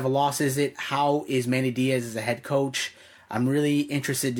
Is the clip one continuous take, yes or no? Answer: yes